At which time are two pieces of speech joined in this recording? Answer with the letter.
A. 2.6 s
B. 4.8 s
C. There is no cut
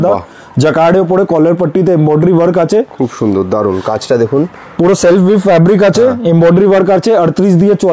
C